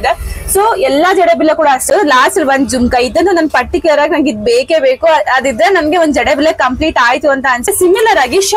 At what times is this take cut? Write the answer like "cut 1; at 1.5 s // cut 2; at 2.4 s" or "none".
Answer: cut 1; at 1.9 s // cut 2; at 7.7 s